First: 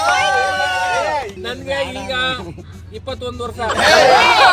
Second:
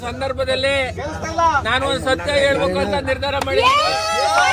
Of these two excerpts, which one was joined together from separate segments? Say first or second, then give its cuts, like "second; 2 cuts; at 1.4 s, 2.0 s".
first; 1 cut; at 1.4 s